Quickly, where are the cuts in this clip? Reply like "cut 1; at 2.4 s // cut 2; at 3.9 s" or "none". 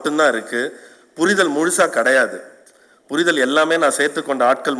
none

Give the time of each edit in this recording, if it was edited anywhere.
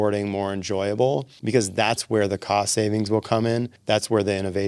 cut 1; at 1.3 s // cut 2; at 3.7 s

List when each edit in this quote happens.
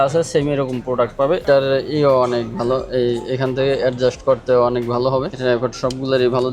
cut 1; at 1.4 s // cut 2; at 5.3 s

